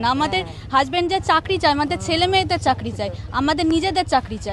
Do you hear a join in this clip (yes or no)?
no